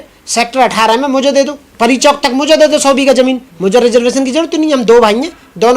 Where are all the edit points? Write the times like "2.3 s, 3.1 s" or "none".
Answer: 1.7 s

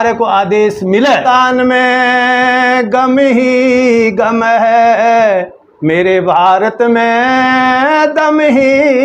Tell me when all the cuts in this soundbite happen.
1.2 s

